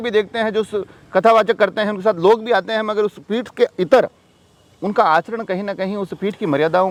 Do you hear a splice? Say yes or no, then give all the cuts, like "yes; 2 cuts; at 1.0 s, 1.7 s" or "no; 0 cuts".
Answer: no; 0 cuts